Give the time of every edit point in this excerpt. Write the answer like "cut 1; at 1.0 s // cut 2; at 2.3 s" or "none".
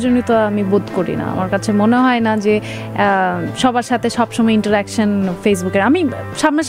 none